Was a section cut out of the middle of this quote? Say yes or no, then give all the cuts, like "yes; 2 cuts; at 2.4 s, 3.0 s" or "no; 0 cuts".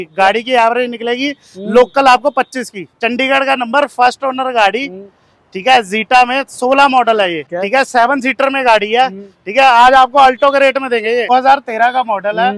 yes; 3 cuts; at 2.8 s, 7.4 s, 11.3 s